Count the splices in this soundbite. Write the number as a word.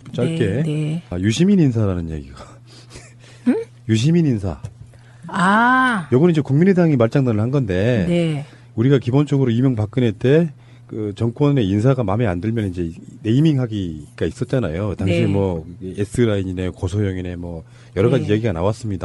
one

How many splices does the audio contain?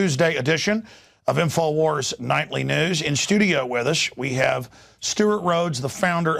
one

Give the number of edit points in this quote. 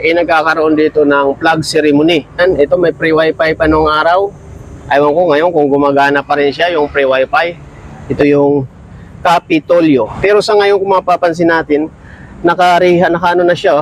three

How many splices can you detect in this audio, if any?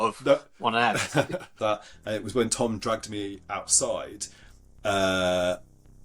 one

